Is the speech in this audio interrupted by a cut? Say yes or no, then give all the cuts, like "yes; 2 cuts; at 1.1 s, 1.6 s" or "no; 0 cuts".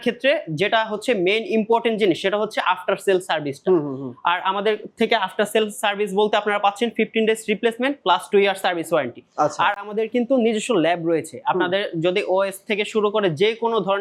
no; 0 cuts